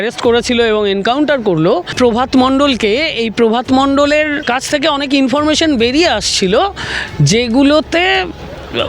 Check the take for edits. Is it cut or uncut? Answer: cut